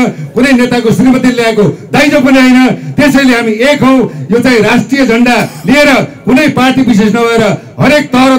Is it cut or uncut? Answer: uncut